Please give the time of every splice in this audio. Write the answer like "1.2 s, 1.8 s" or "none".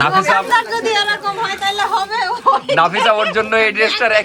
none